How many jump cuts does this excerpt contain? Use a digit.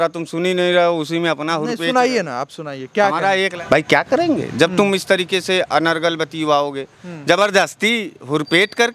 1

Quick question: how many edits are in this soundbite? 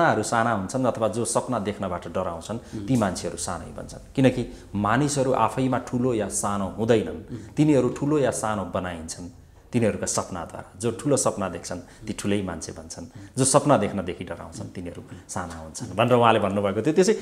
0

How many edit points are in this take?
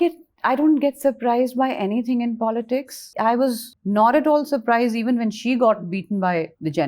2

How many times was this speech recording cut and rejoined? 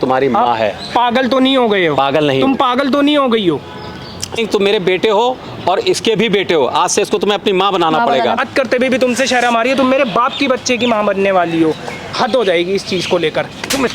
3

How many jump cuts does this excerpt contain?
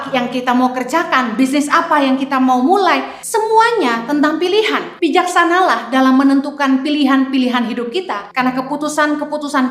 3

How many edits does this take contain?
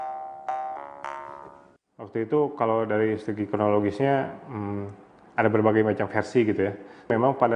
1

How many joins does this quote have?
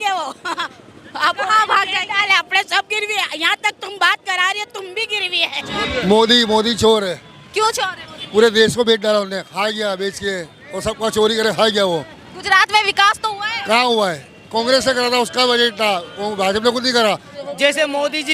2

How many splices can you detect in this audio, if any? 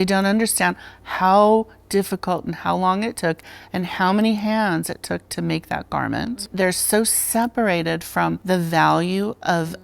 2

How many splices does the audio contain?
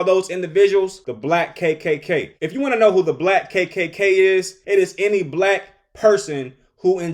3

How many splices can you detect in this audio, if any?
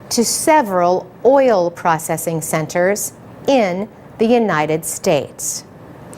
1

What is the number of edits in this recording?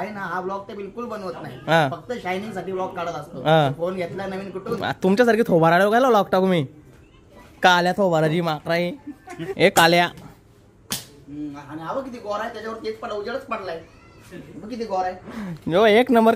1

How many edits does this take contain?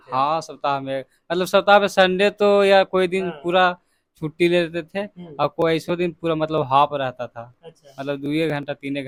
0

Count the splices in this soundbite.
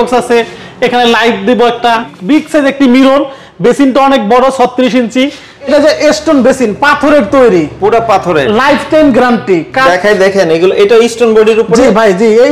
3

